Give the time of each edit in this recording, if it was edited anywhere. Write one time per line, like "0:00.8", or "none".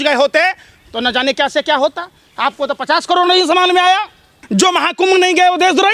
0:04.4